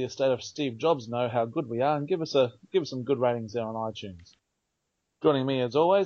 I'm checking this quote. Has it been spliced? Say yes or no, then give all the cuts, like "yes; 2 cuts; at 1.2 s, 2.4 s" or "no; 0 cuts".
no; 0 cuts